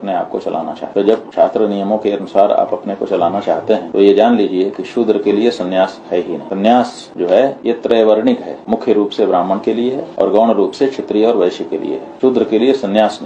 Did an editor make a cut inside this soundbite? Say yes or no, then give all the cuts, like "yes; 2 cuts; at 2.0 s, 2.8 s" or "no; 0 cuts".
no; 0 cuts